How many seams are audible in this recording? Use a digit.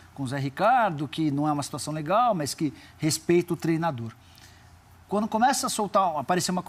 0